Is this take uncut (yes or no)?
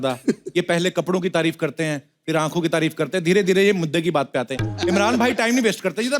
yes